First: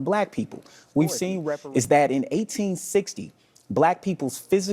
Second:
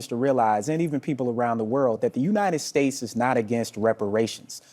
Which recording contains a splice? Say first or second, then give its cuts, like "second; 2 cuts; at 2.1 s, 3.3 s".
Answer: first; 1 cut; at 1.4 s